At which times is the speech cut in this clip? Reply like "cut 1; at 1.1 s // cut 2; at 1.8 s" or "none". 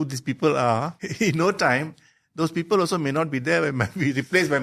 cut 1; at 1.0 s

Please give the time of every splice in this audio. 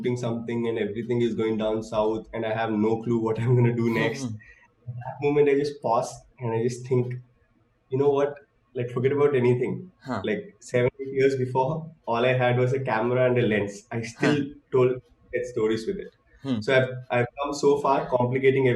none

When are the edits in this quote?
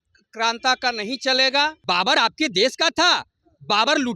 cut 1; at 1.8 s

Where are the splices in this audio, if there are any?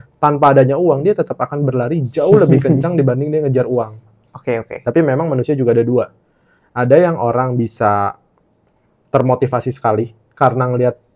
none

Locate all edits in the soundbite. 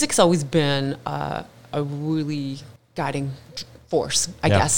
cut 1; at 2.7 s

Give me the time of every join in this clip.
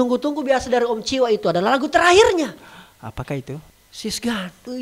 cut 1; at 3.8 s

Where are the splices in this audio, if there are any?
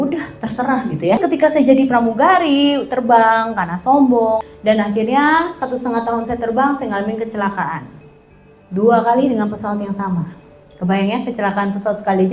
cut 1; at 1.2 s // cut 2; at 4.5 s

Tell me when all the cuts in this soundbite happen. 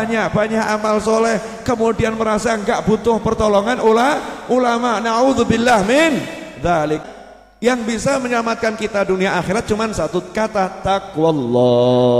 cut 1; at 7.1 s

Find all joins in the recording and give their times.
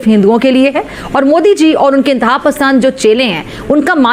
none

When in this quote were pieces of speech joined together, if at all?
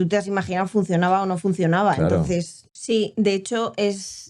cut 1; at 2.6 s

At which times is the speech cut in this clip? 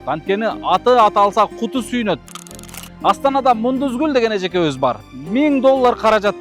cut 1; at 2.3 s // cut 2; at 5.1 s

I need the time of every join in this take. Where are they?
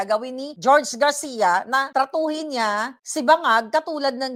none

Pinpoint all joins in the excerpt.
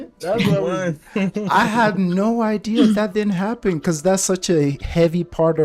none

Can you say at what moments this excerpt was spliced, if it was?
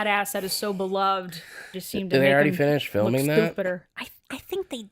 cut 1; at 1.7 s

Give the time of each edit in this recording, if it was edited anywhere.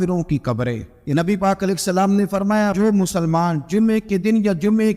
cut 1; at 0.9 s

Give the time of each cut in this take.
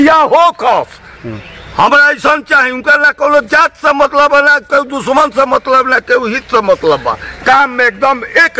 none

